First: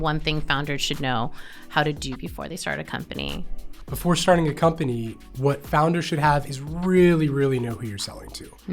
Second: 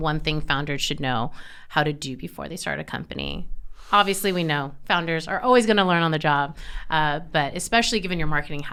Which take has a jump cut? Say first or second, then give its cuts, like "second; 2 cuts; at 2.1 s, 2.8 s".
first; 2 cuts; at 3.7 s, 6.6 s